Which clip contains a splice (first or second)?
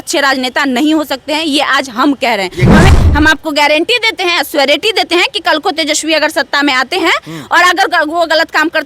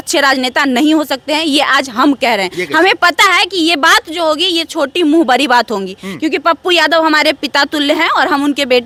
first